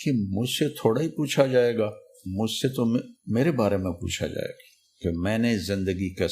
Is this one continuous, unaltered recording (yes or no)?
no